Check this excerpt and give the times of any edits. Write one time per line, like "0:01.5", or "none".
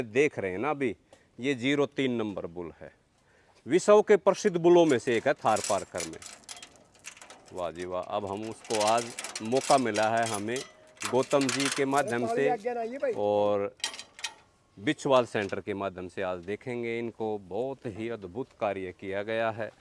none